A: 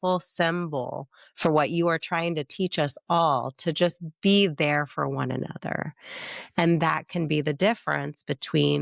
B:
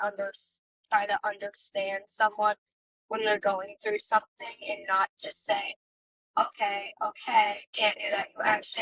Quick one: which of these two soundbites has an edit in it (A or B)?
B